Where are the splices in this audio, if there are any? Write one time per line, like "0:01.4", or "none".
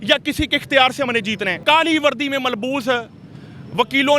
0:01.6